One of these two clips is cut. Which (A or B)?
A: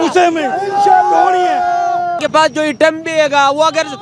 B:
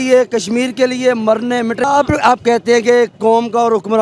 A